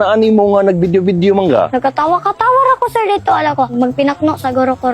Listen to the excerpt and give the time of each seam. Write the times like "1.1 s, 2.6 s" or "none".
1.7 s, 3.7 s